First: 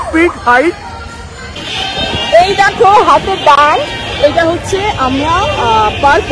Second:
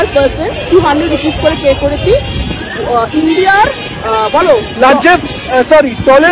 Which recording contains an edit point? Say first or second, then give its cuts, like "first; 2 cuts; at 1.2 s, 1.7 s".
first; 1 cut; at 1.8 s